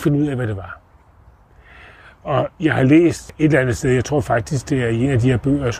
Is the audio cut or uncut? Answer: cut